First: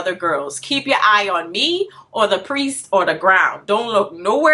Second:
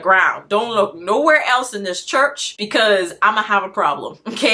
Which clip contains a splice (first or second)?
second